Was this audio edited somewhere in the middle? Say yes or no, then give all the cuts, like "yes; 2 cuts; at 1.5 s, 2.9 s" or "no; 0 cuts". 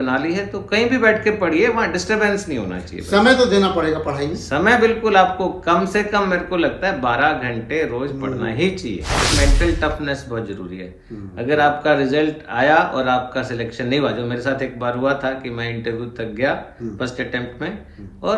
yes; 1 cut; at 9.3 s